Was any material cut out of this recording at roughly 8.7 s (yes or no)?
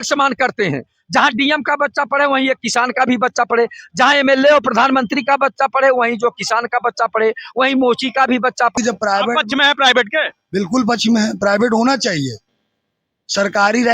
yes